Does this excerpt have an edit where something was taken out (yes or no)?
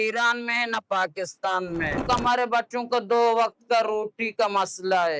yes